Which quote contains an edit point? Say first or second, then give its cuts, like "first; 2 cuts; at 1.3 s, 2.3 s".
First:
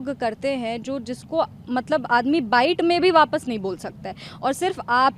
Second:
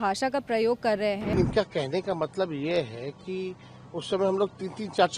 second; 1 cut; at 1.3 s